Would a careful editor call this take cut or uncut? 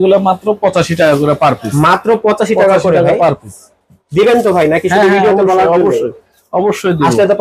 uncut